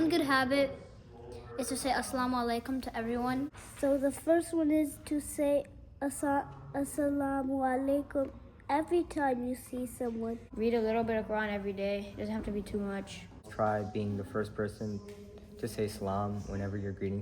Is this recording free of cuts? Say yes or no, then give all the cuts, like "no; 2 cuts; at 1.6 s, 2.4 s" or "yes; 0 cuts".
no; 3 cuts; at 3.6 s, 10.5 s, 13.5 s